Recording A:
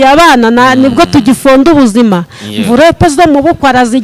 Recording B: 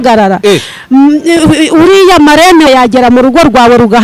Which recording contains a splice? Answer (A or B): B